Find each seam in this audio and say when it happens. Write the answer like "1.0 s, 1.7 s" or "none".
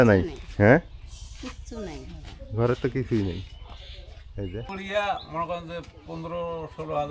4.7 s